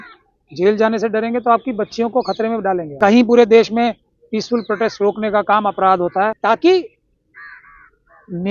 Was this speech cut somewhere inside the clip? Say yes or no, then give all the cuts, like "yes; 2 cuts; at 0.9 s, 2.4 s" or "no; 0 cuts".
yes; 2 cuts; at 2.9 s, 6.4 s